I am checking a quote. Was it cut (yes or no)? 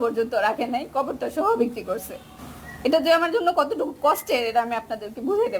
no